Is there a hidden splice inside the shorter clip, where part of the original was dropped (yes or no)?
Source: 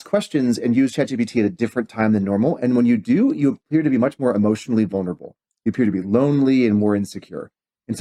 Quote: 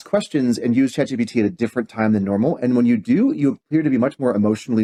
no